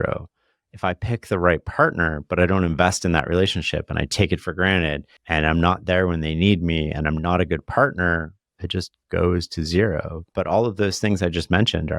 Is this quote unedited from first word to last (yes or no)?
no